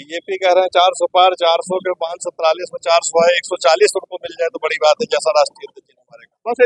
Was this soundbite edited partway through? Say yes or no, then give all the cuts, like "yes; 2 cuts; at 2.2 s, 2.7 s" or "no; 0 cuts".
no; 0 cuts